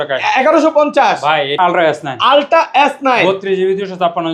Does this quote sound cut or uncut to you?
cut